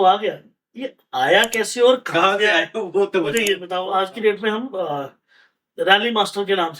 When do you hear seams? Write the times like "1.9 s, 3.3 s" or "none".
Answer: 3.6 s